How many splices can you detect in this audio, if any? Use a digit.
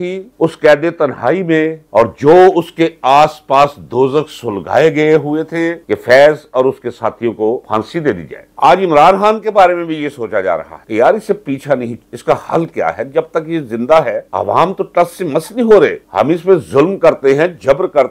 1